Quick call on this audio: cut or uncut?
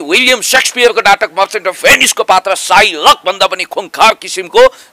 uncut